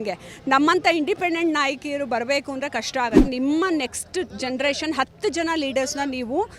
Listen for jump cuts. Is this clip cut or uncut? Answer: cut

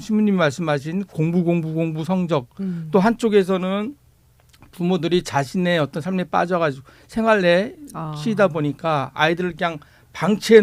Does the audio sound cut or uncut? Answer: uncut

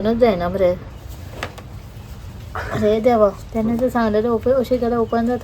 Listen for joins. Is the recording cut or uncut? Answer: cut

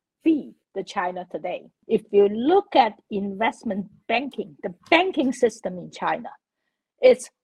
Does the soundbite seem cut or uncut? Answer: cut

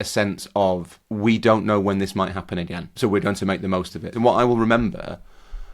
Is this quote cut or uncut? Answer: cut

